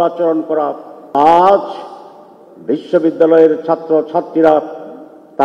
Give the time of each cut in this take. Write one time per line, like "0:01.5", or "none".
0:01.1